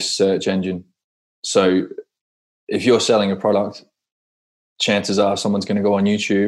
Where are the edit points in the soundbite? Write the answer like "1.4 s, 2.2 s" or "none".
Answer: none